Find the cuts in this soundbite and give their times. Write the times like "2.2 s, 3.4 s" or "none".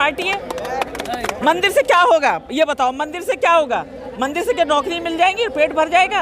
1.3 s